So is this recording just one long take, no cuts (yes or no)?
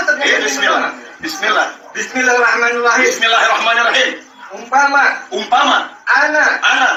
yes